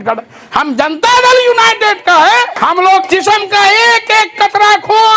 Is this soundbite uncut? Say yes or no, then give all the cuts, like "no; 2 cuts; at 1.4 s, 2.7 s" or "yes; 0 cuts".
no; 1 cut; at 2.5 s